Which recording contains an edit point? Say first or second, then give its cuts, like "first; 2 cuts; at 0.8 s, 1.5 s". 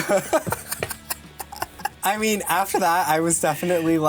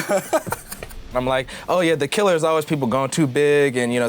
second; 1 cut; at 1.1 s